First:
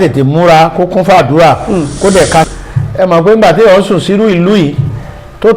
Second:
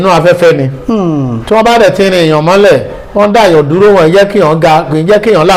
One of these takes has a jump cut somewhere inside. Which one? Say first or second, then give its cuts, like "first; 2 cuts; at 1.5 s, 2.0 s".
first; 1 cut; at 2.5 s